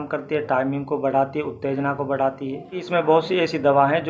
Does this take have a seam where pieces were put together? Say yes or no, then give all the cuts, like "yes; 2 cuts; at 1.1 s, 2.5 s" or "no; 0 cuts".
yes; 1 cut; at 2.8 s